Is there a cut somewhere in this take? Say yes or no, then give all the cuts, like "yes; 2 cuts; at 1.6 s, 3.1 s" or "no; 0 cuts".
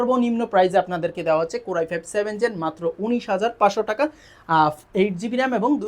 no; 0 cuts